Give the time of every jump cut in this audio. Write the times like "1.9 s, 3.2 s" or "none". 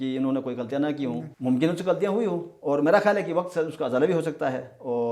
1.3 s